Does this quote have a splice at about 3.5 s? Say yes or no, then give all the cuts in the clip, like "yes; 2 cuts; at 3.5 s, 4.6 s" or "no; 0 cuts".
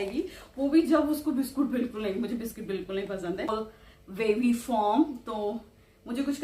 yes; 1 cut; at 3.5 s